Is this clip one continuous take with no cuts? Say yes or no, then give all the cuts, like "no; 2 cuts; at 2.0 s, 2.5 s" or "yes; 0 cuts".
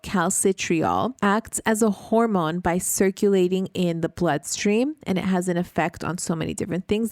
no; 1 cut; at 1.1 s